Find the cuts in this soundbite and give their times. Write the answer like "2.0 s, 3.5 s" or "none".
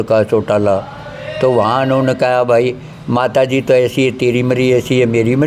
none

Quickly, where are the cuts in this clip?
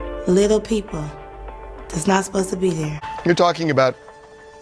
3.1 s

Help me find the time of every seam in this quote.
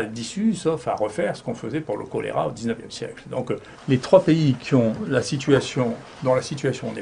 3.7 s

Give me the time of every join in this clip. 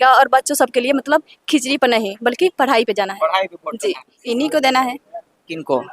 4.1 s

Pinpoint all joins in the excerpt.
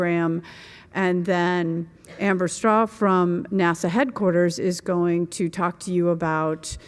none

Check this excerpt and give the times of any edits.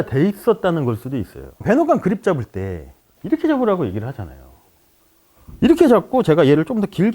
1.6 s

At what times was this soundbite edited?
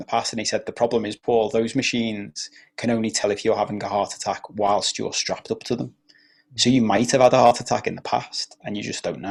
none

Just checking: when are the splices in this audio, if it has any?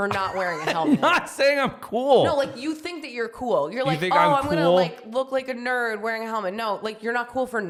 none

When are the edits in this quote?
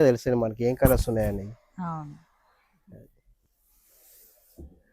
3.2 s

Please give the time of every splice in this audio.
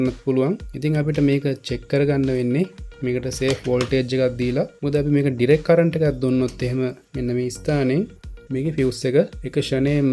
none

